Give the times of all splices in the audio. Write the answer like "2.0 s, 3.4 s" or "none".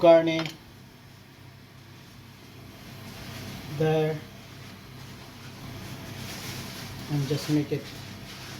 5.6 s